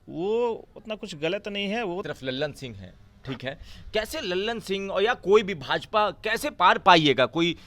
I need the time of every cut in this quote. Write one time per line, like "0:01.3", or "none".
0:02.0